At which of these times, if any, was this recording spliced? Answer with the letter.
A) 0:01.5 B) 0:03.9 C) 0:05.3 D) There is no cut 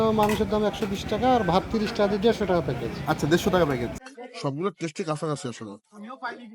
B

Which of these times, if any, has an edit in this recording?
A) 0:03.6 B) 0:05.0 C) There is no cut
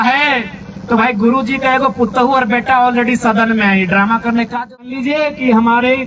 B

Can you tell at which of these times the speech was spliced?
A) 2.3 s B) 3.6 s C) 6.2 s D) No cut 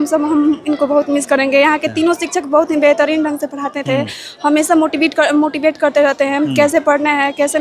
D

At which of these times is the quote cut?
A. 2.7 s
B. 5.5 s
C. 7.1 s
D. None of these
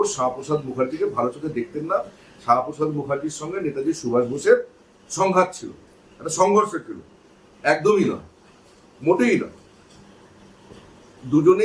D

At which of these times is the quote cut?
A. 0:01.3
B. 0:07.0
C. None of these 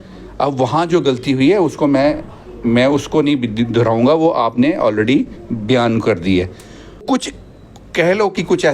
B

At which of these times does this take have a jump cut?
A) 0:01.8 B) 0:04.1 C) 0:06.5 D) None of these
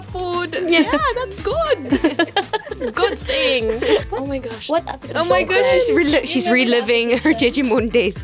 B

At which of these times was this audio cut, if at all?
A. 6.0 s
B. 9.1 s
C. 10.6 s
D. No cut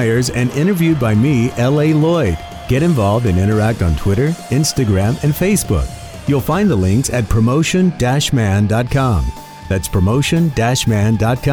D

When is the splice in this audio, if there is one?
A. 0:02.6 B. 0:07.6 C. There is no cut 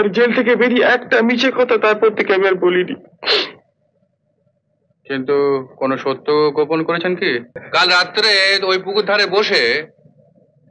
B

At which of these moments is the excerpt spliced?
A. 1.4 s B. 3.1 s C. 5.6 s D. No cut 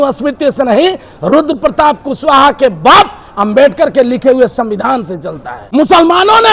C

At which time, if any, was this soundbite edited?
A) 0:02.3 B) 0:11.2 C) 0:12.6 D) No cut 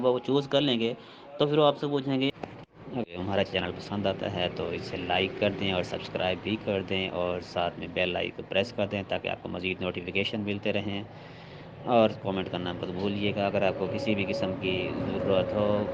A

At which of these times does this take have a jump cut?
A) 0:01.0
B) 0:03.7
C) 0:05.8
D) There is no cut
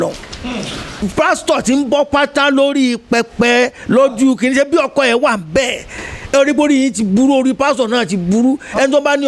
A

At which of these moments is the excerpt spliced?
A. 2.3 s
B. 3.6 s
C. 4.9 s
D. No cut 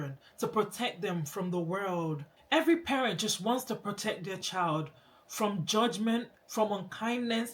A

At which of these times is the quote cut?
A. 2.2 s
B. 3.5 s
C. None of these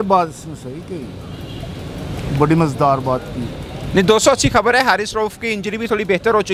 C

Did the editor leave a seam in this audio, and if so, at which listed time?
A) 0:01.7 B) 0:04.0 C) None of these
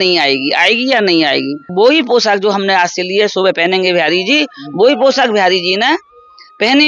A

